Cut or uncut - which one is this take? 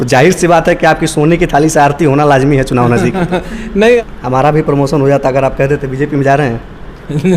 cut